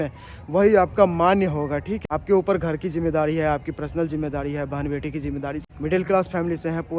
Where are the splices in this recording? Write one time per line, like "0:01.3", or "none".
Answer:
0:01.9
0:05.7

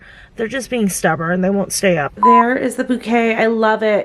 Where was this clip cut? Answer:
0:02.1

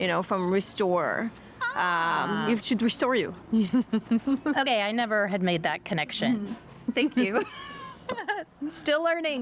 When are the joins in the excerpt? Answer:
none

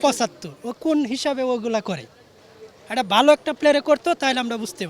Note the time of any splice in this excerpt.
none

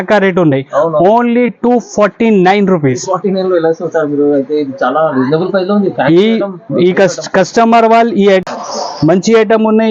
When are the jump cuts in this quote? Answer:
0:08.4

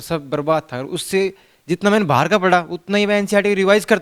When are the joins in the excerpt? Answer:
none

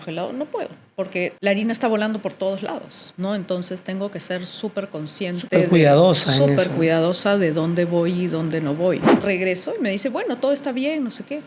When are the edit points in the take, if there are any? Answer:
0:09.1

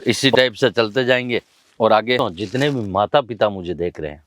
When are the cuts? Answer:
0:02.2

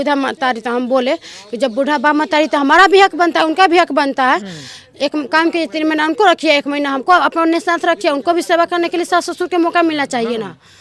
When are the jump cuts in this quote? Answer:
none

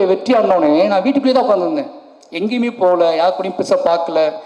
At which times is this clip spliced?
none

